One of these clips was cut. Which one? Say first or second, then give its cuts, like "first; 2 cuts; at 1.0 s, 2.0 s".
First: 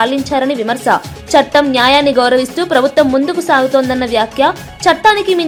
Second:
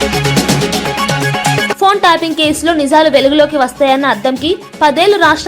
second; 1 cut; at 1.8 s